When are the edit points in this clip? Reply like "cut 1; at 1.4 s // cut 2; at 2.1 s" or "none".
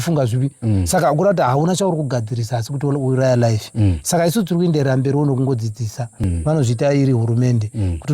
cut 1; at 6.1 s